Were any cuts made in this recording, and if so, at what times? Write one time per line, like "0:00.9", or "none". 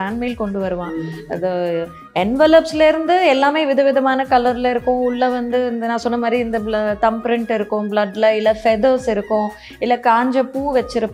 none